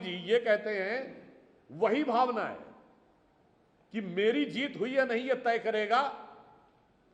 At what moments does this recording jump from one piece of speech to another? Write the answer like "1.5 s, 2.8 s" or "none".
none

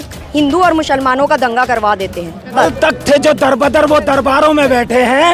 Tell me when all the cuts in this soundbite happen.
2.6 s

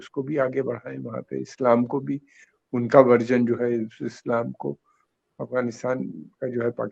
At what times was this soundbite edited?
none

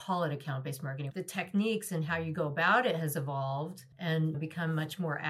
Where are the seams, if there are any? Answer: 1.0 s, 4.3 s

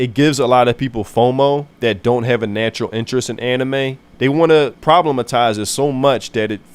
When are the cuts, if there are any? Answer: 4.0 s, 4.8 s

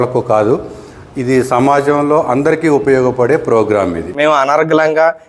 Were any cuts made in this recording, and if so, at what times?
4.0 s

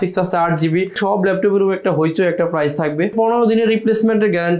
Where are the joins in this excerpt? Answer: 1.0 s, 3.1 s

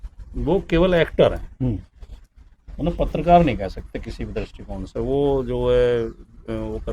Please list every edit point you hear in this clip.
none

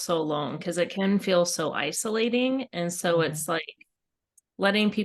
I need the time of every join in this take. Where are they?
none

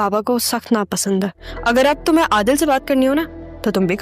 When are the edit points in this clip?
1.4 s

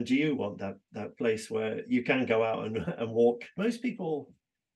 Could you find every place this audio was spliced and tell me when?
3.5 s

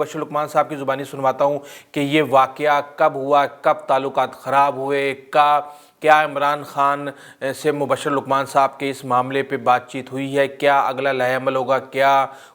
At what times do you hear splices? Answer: none

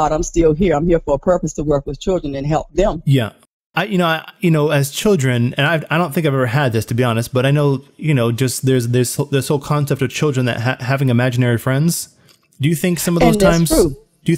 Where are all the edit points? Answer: 3.4 s

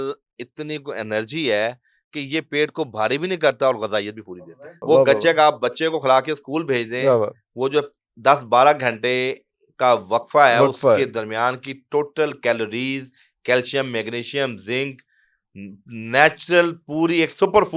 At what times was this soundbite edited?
4.6 s

